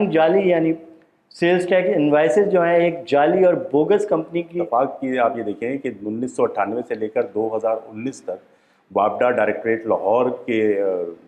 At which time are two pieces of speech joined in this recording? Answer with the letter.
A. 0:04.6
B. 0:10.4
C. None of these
A